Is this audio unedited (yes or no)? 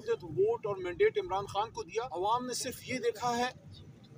no